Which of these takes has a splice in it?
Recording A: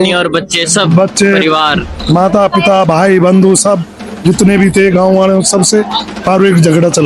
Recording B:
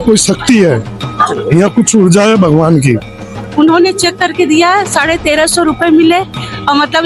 B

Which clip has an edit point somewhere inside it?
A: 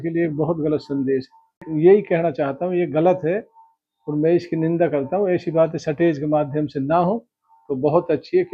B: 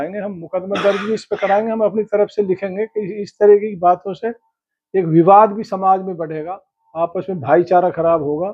A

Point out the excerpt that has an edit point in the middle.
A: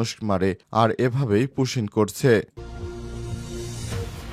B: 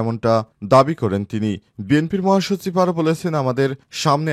A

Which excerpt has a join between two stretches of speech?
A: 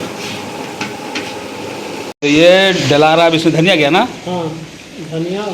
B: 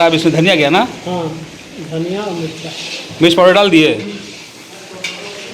A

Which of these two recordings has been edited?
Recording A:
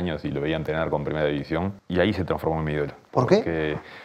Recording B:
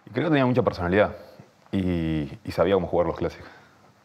A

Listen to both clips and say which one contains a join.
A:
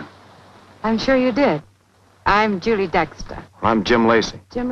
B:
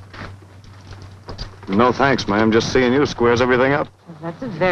A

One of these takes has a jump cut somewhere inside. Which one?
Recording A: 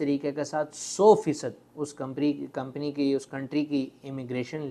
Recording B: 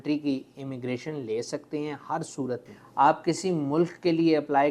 B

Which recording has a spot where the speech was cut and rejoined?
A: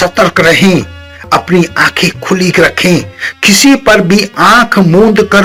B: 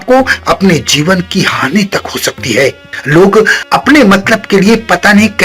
B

